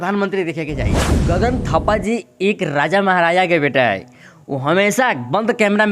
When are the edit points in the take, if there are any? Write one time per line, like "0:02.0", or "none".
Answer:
0:01.2